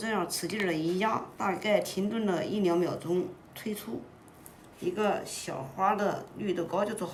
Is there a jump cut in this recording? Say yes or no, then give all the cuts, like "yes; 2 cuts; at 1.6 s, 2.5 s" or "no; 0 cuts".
no; 0 cuts